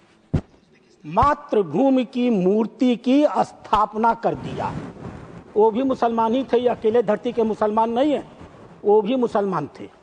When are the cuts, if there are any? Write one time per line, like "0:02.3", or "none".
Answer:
none